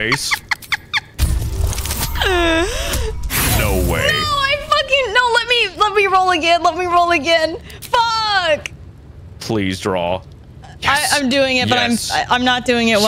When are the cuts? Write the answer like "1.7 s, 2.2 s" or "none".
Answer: none